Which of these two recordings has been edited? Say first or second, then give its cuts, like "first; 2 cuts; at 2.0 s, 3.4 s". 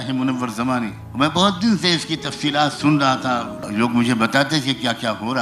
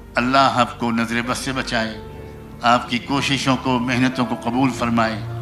first; 2 cuts; at 1.0 s, 3.5 s